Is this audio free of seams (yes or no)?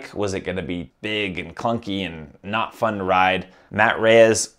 no